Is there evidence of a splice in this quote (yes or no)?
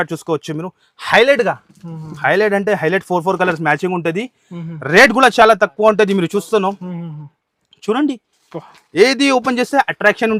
no